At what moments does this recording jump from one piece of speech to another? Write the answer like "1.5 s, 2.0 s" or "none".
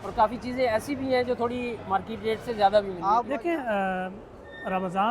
3.3 s